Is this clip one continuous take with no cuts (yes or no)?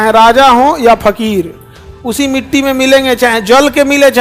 yes